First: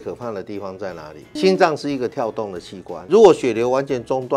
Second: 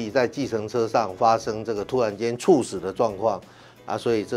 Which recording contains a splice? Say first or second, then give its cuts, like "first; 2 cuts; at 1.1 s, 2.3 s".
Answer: first; 2 cuts; at 1.4 s, 3.0 s